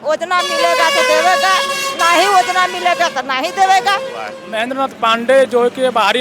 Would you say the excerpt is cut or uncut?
cut